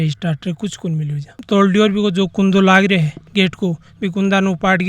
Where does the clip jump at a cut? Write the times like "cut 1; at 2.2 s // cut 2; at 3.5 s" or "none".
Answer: cut 1; at 1.4 s